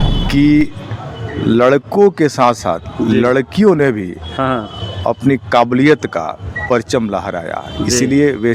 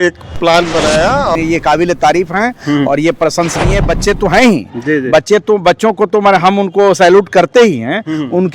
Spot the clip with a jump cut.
second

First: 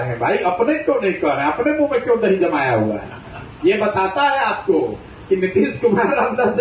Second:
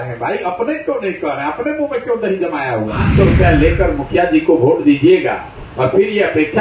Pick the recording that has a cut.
second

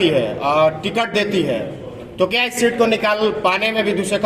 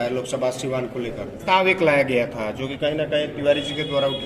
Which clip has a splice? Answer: second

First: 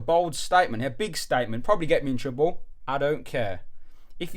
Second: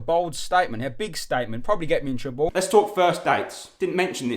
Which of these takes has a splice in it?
second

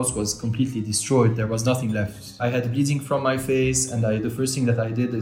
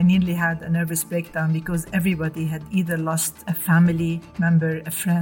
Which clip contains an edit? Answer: second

